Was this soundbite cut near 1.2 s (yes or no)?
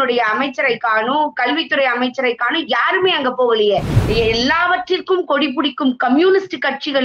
no